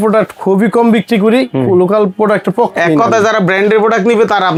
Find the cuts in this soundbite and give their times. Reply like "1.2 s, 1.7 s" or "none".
none